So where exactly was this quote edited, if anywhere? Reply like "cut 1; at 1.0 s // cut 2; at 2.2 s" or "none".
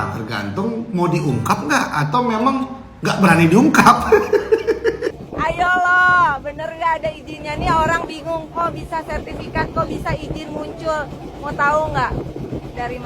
cut 1; at 5.1 s